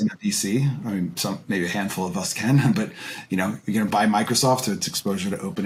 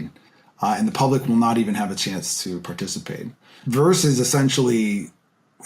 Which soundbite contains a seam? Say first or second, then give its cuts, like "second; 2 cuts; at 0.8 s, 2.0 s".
second; 1 cut; at 3.3 s